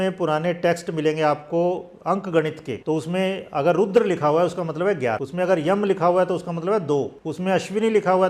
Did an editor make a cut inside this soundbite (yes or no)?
yes